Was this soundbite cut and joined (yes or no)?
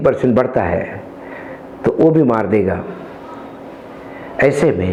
no